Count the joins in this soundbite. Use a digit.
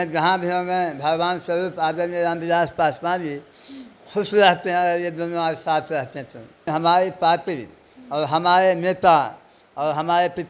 1